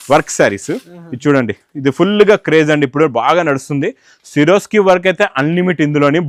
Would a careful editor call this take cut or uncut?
uncut